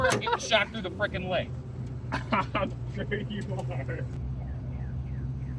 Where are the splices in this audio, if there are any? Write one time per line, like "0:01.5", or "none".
0:04.2